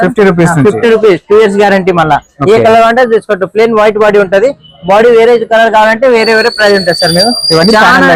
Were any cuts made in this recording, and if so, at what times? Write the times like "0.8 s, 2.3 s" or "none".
none